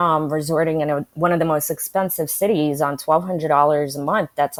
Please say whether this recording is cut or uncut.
uncut